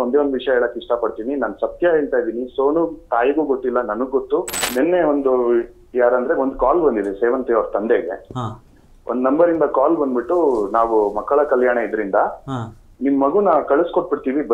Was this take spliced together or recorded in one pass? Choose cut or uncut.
cut